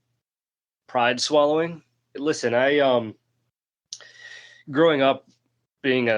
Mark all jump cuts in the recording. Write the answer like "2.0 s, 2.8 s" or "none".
2.2 s